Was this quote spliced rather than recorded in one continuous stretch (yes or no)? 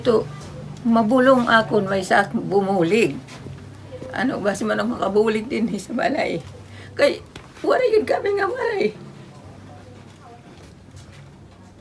no